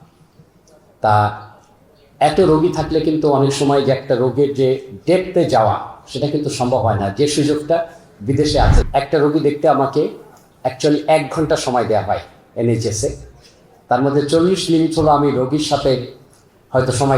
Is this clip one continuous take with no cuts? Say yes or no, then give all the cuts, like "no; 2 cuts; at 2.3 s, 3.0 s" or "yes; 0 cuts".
no; 1 cut; at 8.8 s